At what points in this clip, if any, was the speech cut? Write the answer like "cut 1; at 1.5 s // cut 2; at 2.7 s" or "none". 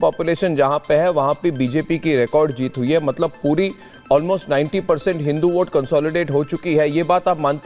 none